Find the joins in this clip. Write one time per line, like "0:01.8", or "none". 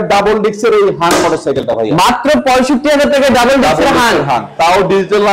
none